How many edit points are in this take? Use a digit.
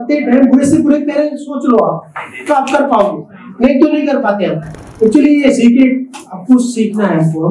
1